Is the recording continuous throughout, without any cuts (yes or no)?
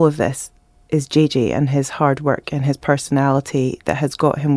yes